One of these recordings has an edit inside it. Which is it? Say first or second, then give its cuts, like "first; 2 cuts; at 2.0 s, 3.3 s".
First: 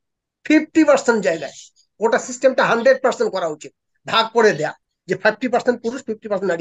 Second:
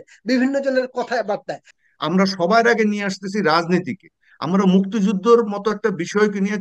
second; 1 cut; at 1.7 s